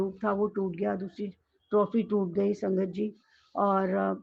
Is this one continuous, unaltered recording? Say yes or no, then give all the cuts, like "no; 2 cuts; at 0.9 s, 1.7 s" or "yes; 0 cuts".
yes; 0 cuts